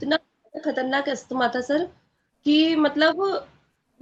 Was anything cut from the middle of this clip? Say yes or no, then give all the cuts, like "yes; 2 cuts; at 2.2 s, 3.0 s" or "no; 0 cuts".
no; 0 cuts